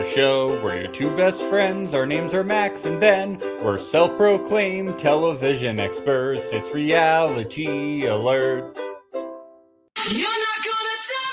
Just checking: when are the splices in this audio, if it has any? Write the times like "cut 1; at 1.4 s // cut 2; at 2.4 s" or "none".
cut 1; at 9.9 s